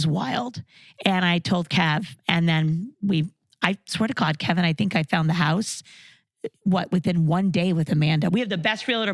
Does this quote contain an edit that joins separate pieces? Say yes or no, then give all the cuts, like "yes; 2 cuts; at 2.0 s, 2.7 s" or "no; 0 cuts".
no; 0 cuts